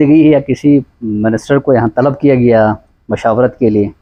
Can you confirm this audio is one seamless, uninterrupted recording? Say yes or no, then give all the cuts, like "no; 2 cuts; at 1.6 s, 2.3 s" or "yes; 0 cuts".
yes; 0 cuts